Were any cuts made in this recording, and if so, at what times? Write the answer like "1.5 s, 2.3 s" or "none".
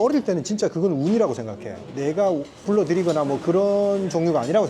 2.5 s